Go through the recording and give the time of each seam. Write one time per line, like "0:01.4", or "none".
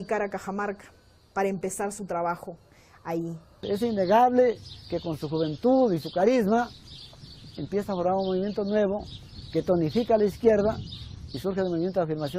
0:06.9